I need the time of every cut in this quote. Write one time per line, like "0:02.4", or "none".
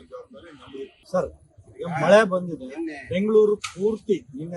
0:01.0

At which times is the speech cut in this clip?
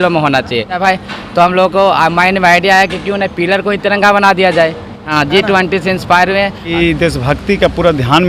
0:00.8
0:05.1
0:06.7

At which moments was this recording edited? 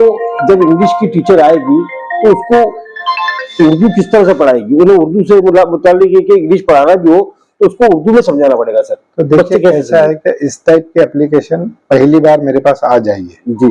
none

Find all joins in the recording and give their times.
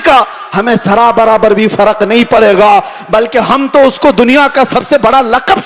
none

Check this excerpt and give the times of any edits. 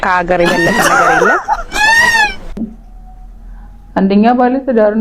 0:02.6

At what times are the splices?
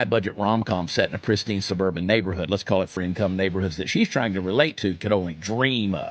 0:02.9

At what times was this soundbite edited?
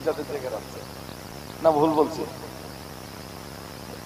0:01.3

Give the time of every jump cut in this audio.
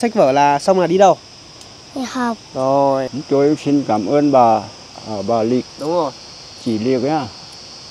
0:03.1
0:05.0

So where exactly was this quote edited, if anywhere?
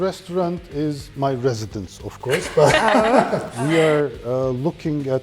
0:03.4

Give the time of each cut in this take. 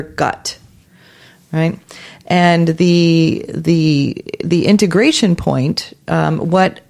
none

